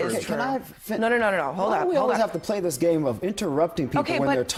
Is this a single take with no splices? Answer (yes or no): yes